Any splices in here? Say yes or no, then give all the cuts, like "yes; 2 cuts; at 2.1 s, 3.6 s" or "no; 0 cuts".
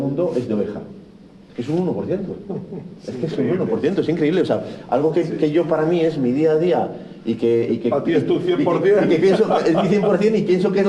no; 0 cuts